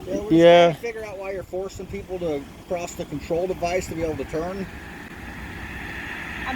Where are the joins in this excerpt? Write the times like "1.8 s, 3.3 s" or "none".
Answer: none